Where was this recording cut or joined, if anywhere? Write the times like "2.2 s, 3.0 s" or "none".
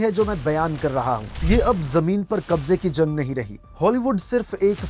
1.3 s, 3.7 s